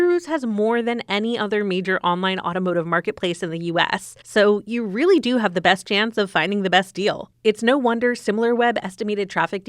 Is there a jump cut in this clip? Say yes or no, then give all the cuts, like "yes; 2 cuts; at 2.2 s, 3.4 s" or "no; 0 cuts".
yes; 1 cut; at 7.3 s